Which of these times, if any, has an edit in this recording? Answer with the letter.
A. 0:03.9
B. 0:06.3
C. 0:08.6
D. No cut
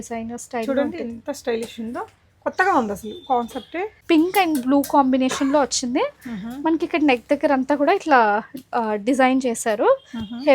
A